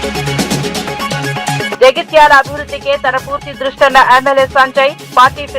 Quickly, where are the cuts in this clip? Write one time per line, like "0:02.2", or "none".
0:01.7